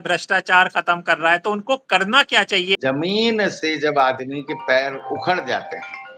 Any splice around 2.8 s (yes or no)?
yes